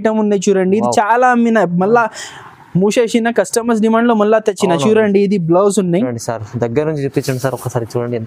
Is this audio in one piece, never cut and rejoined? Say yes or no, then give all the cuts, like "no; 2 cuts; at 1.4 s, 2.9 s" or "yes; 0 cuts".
yes; 0 cuts